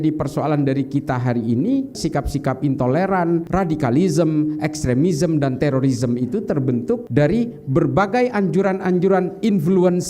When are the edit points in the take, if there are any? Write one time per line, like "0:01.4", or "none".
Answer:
0:02.0
0:03.5
0:07.0